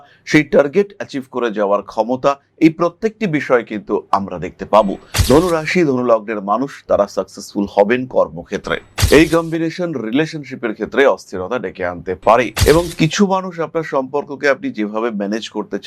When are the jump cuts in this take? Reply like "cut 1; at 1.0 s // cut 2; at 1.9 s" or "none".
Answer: cut 1; at 8.9 s